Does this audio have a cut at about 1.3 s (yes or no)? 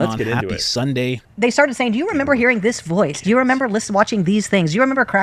yes